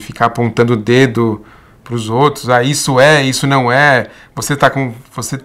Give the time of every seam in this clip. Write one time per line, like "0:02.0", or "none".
none